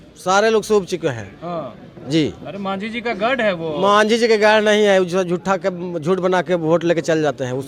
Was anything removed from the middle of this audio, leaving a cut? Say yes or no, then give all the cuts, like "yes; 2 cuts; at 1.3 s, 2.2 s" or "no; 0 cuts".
no; 0 cuts